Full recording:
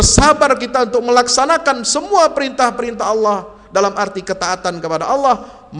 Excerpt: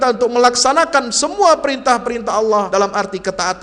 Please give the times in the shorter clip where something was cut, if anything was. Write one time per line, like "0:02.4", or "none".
0:02.7

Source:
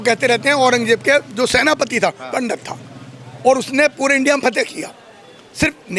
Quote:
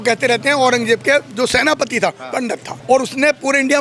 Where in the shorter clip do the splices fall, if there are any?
0:02.7

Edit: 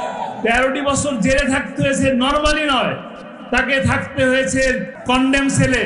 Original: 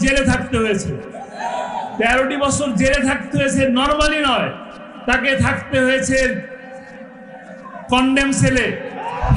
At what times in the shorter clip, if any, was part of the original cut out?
0:04.9

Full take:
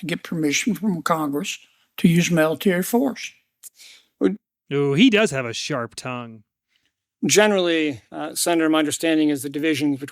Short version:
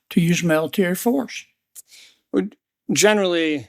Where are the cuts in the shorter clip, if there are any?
0:02.6

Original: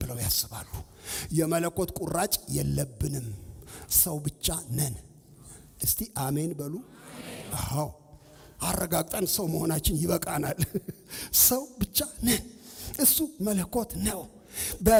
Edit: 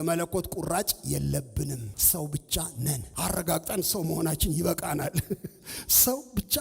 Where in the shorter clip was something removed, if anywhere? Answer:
0:01.9
0:03.1

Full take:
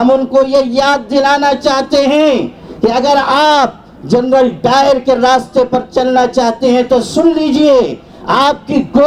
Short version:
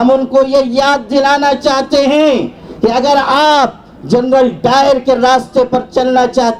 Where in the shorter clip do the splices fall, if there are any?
none

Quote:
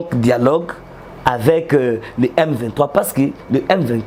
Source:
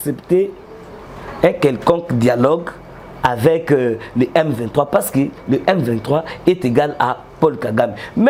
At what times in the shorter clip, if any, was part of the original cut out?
none

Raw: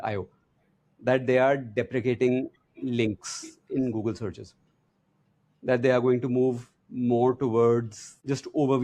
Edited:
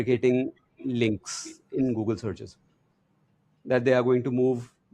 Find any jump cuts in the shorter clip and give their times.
none

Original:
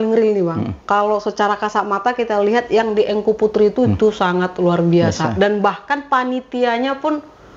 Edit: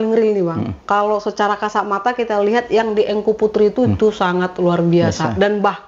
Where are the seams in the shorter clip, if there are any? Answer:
none

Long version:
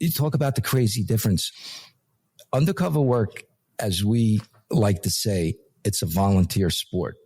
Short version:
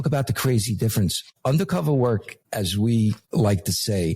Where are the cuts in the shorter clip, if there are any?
0:01.3
0:02.4
0:03.2

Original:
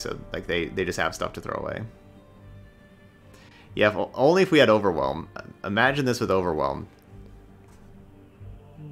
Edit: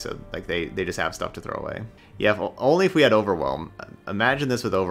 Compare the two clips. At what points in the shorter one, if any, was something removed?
0:02.0

